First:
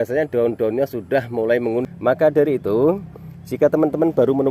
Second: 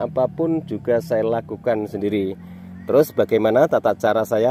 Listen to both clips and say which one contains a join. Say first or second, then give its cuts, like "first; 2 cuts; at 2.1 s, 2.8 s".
first; 1 cut; at 1.8 s